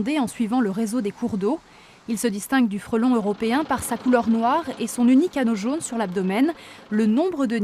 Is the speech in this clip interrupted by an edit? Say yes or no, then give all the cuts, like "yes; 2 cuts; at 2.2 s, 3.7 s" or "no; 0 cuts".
no; 0 cuts